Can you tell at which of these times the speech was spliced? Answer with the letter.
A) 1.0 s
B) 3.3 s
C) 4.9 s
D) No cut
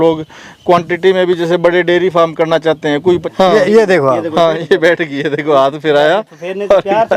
B